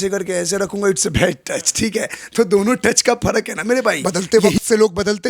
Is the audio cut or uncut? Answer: cut